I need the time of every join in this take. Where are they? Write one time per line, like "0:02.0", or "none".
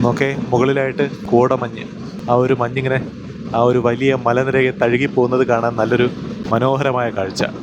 0:01.2
0:02.1